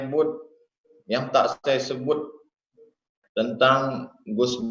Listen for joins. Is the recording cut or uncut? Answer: uncut